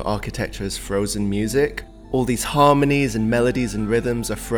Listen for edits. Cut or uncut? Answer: cut